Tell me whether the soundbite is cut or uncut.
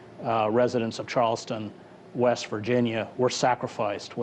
uncut